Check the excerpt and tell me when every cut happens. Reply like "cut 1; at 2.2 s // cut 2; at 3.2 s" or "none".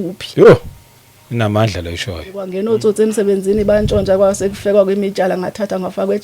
cut 1; at 2.5 s